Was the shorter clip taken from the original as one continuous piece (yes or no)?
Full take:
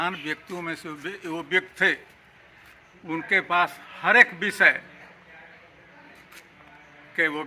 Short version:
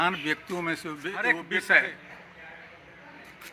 no